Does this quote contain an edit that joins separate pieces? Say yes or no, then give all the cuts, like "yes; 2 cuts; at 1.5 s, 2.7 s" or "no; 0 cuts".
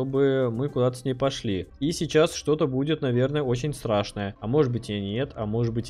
yes; 1 cut; at 1.7 s